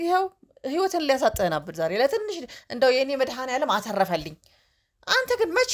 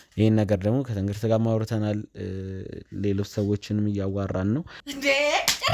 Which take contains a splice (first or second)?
second